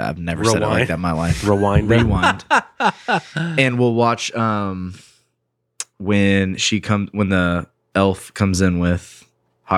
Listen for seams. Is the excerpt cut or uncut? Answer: uncut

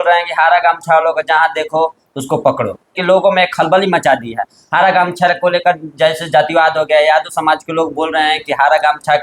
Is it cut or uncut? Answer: cut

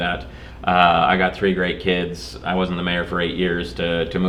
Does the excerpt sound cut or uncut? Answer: uncut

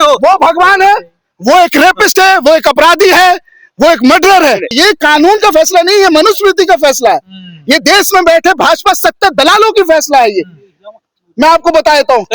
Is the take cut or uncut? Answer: cut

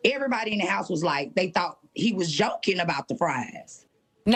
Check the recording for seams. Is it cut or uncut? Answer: uncut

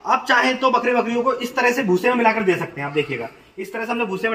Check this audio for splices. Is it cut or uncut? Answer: uncut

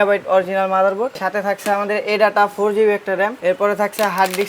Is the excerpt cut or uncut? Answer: cut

